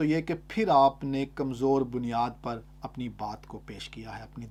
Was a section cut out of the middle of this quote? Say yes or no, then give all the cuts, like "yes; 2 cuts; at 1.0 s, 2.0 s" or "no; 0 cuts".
no; 0 cuts